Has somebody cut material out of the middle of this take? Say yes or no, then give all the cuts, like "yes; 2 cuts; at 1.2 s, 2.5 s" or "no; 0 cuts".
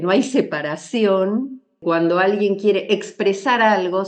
yes; 1 cut; at 1.7 s